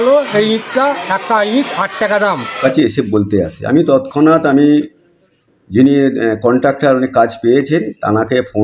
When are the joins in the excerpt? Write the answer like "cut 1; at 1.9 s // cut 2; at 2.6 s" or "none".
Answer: cut 1; at 2.6 s